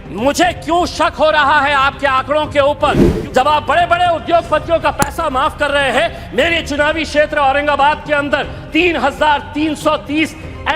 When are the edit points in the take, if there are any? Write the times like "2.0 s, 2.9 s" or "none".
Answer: 3.1 s